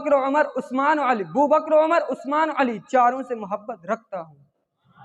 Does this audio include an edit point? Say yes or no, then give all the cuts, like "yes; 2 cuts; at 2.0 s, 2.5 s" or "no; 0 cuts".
no; 0 cuts